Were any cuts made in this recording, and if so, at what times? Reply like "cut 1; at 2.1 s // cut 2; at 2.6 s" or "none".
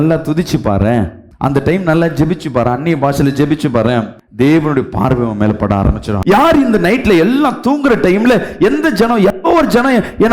none